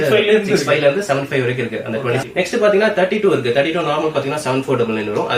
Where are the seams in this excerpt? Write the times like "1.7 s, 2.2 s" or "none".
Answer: 2.2 s

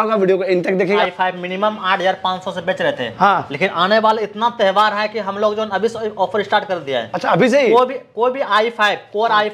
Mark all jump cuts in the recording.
1.0 s

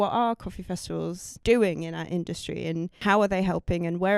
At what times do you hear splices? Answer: 1.3 s, 3.0 s

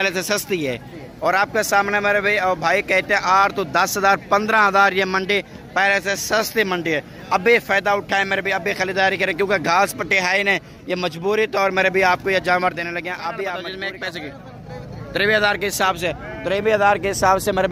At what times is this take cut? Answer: 13.7 s

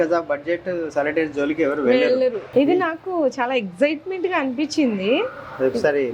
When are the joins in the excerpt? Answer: 2.4 s

